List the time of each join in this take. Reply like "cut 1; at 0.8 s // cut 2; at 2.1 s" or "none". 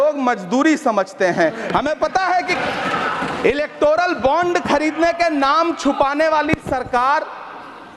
cut 1; at 2.5 s

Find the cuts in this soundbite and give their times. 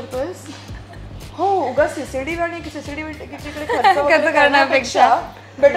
none

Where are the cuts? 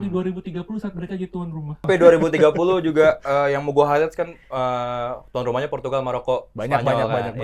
cut 1; at 1.9 s

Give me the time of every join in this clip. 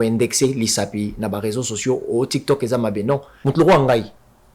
cut 1; at 3.3 s

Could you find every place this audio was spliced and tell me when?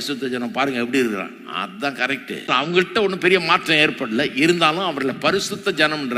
cut 1; at 2.5 s

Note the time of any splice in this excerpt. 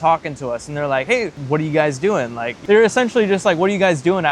cut 1; at 1.1 s // cut 2; at 2.5 s

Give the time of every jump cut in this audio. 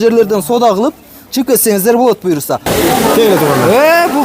cut 1; at 2.7 s

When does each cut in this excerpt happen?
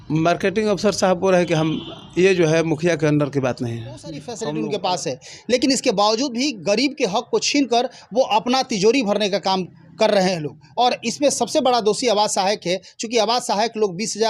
cut 1; at 4.4 s

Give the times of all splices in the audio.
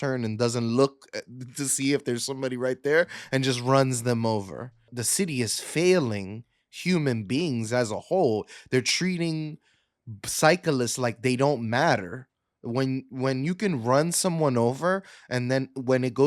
cut 1; at 5.0 s

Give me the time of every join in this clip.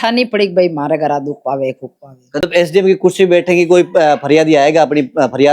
cut 1; at 2.4 s

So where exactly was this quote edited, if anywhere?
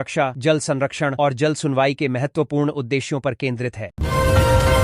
cut 1; at 3.9 s

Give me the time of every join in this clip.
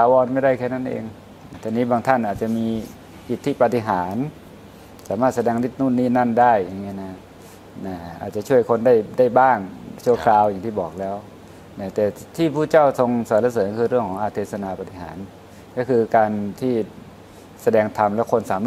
cut 1; at 1.5 s

